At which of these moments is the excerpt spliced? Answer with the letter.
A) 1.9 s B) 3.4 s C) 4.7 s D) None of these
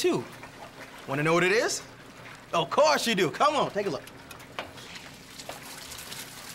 D